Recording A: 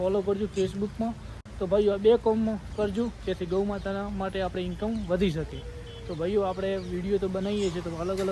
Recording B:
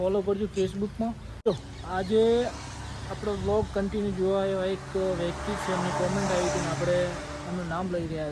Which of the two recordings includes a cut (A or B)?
B